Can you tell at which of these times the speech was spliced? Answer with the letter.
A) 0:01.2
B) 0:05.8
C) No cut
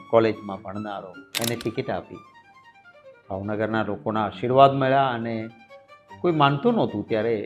A